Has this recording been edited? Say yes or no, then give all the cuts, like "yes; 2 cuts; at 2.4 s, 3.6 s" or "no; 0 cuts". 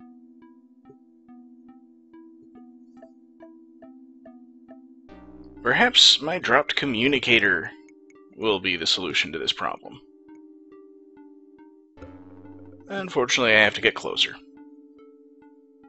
yes; 1 cut; at 2.7 s